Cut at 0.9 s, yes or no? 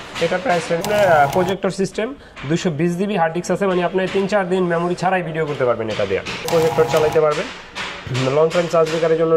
yes